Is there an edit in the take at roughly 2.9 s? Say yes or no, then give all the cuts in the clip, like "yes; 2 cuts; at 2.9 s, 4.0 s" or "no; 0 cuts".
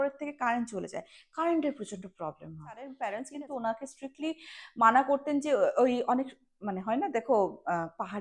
yes; 1 cut; at 2.9 s